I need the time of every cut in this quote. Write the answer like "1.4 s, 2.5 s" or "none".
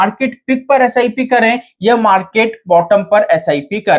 none